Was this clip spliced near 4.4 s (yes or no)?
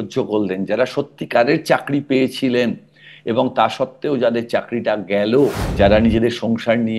no